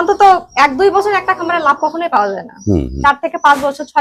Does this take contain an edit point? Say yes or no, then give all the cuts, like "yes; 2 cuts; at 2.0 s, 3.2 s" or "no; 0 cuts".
no; 0 cuts